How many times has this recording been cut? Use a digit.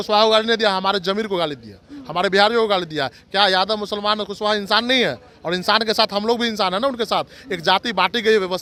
0